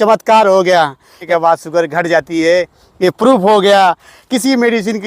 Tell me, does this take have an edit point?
yes; 1 cut; at 1.2 s

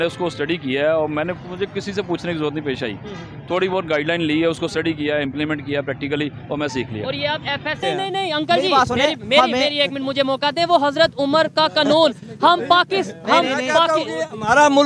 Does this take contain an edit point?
yes; 1 cut; at 7.8 s

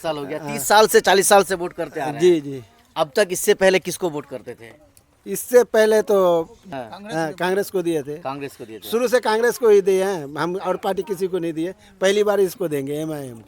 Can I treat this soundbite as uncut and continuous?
no; 1 cut; at 6.6 s

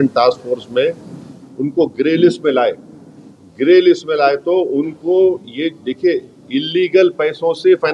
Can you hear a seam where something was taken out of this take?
no; 0 cuts

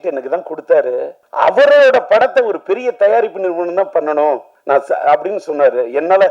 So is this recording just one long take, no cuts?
no; 2 cuts; at 1.2 s, 4.5 s

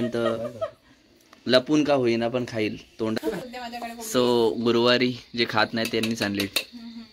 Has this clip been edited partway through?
yes; 1 cut; at 3.2 s

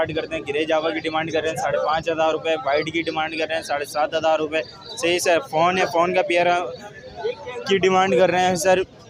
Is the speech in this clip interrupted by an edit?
no; 0 cuts

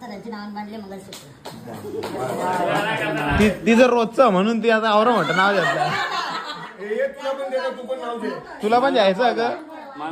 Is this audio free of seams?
yes; 0 cuts

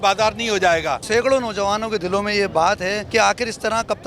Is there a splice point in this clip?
yes; 2 cuts; at 1.0 s, 3.0 s

